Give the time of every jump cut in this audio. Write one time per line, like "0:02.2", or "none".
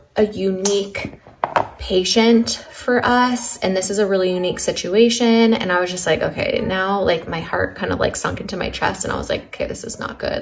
none